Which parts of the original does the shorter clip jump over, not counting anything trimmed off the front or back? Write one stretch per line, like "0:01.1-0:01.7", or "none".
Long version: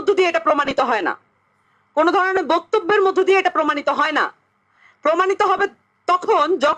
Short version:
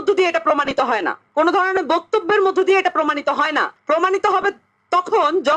0:01.2-0:01.8
0:04.3-0:04.9